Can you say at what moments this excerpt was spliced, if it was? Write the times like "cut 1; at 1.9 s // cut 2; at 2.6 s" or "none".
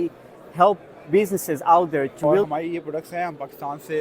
cut 1; at 2.4 s